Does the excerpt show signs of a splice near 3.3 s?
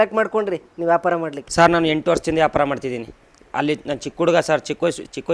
no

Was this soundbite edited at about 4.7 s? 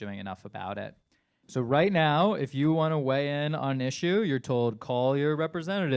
no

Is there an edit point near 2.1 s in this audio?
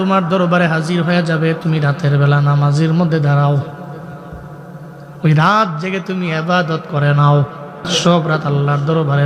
no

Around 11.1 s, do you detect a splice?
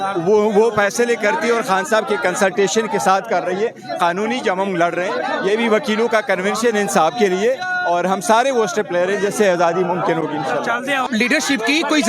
yes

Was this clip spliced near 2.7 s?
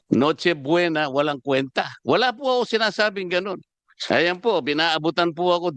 no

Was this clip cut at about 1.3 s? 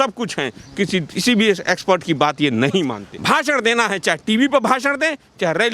no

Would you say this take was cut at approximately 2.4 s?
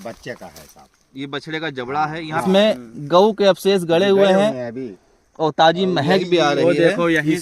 yes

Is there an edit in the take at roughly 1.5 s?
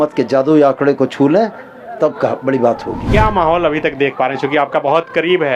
no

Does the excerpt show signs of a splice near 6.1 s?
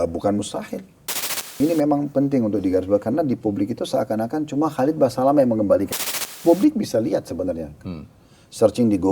yes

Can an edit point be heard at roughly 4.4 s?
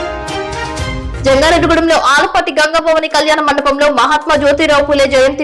no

